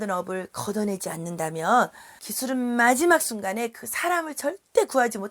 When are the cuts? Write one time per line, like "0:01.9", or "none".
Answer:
none